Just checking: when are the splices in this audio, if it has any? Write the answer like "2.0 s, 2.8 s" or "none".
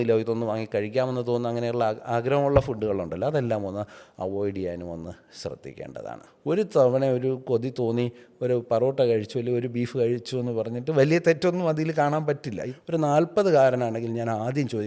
6.3 s, 12.6 s